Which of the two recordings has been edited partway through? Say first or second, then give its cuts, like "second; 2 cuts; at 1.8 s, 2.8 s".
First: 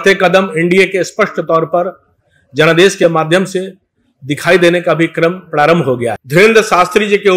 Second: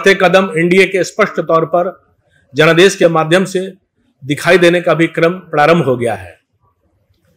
first; 1 cut; at 6.2 s